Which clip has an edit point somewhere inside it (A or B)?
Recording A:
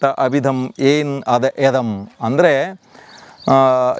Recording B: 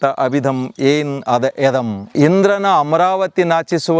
B